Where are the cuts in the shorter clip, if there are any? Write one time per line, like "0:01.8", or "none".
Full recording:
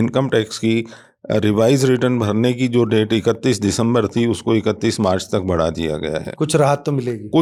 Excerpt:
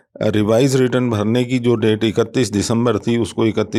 none